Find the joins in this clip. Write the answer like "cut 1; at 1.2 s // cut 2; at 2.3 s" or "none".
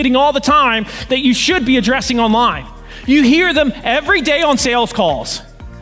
none

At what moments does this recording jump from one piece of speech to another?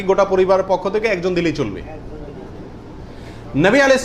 none

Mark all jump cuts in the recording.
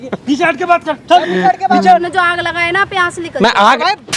cut 1; at 2.1 s

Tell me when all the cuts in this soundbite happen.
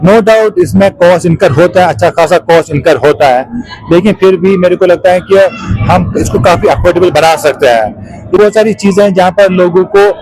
cut 1; at 8.4 s

